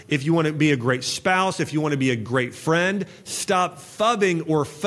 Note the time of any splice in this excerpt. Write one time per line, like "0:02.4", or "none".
none